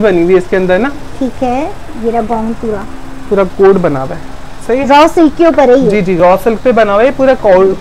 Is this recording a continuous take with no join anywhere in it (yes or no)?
yes